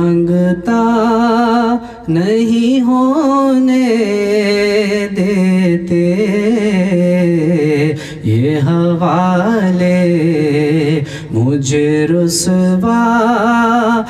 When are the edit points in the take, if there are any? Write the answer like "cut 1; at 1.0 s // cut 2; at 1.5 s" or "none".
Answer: none